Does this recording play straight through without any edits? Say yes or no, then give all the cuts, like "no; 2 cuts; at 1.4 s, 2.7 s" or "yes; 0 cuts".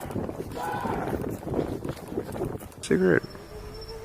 no; 1 cut; at 2.8 s